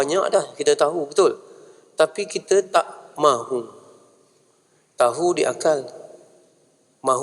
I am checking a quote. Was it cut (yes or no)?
no